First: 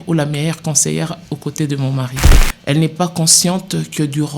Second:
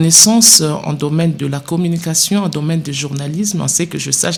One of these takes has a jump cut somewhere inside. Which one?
first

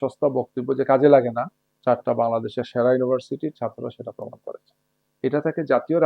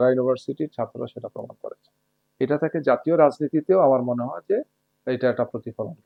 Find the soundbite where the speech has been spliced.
first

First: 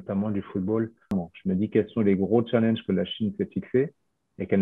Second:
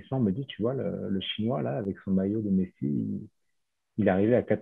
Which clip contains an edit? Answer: first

